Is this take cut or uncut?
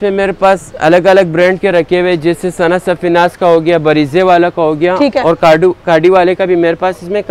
uncut